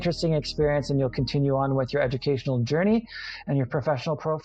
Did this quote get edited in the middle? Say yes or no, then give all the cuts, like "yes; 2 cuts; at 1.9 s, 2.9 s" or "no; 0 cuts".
no; 0 cuts